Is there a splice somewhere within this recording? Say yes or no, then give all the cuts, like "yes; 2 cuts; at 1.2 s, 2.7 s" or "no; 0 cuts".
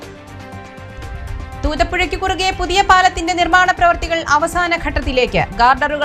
no; 0 cuts